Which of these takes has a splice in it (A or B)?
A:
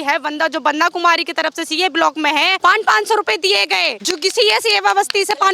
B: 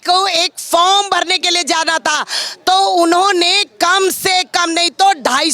A